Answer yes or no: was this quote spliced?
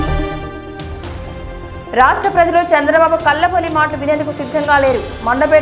no